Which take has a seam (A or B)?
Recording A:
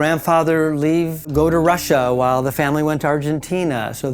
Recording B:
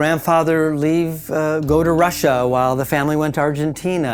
A